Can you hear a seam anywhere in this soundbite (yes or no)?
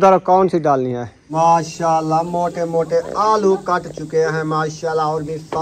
yes